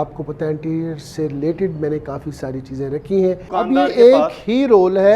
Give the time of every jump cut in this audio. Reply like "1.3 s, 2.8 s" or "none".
3.4 s